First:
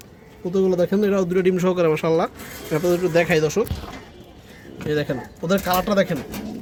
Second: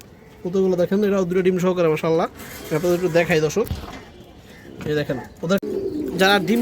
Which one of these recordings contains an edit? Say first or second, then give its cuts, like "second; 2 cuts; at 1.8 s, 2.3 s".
second; 1 cut; at 5.6 s